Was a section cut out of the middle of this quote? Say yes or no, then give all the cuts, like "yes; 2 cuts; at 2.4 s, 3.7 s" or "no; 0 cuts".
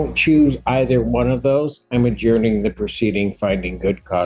no; 0 cuts